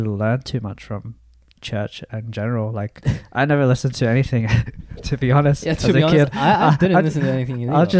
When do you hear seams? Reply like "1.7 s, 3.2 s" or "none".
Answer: none